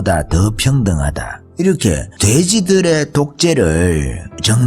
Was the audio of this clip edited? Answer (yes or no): no